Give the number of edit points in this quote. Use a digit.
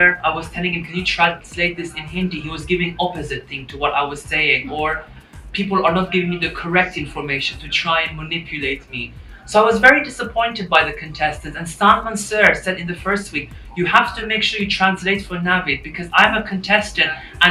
0